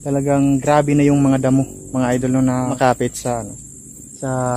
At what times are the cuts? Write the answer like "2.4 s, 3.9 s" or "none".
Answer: 2.8 s